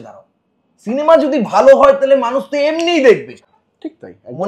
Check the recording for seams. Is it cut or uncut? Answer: uncut